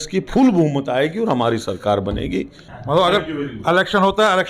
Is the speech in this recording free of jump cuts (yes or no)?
no